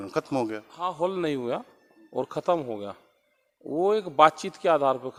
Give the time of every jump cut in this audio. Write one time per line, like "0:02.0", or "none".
none